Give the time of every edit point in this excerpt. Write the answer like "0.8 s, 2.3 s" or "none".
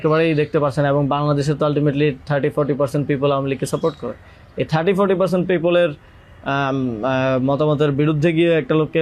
none